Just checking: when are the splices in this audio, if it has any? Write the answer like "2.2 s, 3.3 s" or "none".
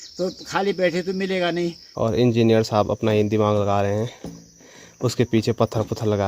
1.8 s

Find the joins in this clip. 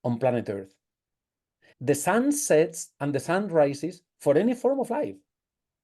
1.7 s

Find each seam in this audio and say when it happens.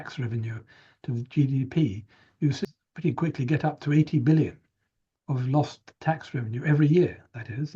2.8 s

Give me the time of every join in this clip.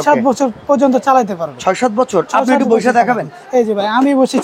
none

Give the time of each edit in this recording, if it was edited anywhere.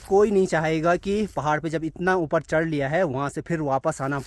none

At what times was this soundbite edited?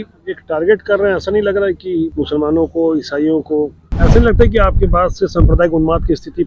2.1 s, 3.9 s

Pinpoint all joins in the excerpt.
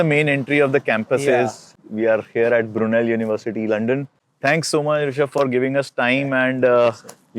1.8 s

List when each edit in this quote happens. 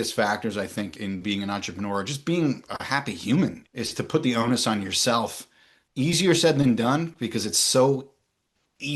0.9 s

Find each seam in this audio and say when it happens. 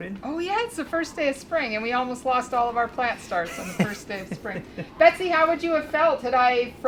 none

